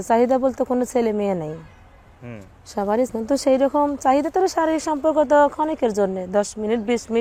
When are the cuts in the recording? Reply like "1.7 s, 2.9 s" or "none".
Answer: 3.1 s